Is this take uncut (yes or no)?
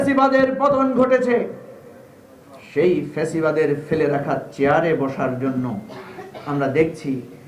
yes